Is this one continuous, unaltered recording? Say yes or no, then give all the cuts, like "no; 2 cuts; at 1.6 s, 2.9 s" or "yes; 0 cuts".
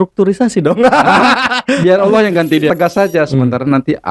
no; 1 cut; at 2.7 s